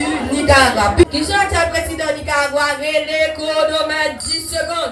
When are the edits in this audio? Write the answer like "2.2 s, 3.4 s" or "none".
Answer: 1.0 s